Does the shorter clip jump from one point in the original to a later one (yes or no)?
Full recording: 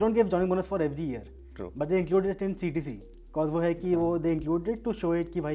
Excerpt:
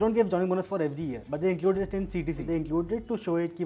yes